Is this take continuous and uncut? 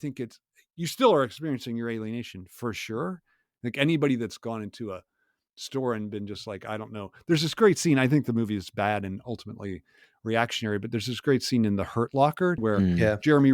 no; 1 cut; at 12.6 s

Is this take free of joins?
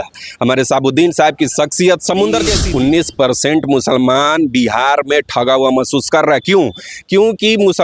no; 1 cut; at 2.6 s

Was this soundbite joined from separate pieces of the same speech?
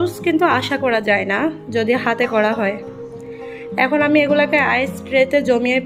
no; 0 cuts

